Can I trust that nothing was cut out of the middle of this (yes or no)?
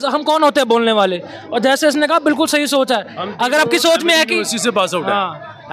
yes